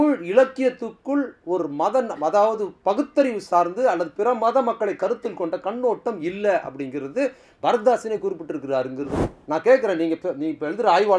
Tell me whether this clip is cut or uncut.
cut